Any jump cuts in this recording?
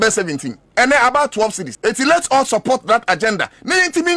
yes; 1 cut; at 1.7 s

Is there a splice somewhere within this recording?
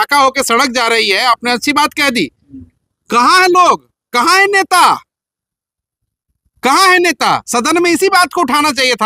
no; 0 cuts

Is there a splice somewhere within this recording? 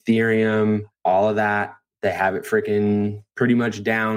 yes; 1 cut; at 0.9 s

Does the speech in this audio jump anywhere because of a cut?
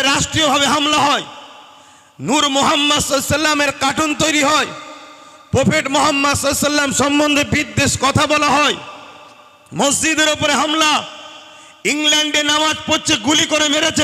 no; 0 cuts

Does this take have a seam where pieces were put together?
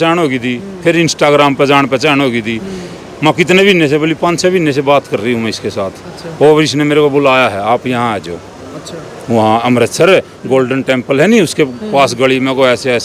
no; 0 cuts

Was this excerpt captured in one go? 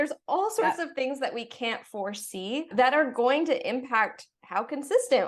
no; 1 cut; at 2.7 s

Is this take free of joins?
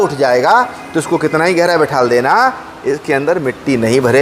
yes; 0 cuts

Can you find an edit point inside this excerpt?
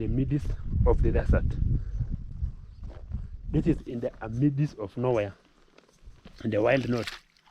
yes; 1 cut; at 2.3 s

